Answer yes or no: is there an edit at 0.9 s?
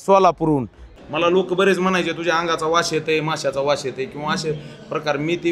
yes